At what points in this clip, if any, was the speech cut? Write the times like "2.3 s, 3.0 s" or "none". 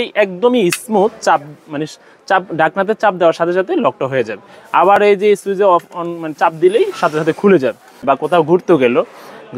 8.0 s